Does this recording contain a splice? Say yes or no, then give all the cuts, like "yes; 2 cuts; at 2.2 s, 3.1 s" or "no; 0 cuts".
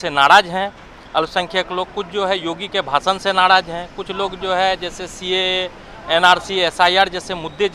no; 0 cuts